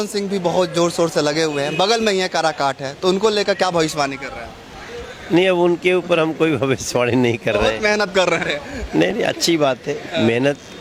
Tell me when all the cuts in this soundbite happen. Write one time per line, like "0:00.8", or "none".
none